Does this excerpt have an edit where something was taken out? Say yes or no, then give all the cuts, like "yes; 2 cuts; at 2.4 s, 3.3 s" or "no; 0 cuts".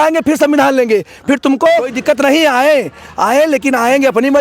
yes; 1 cut; at 1.9 s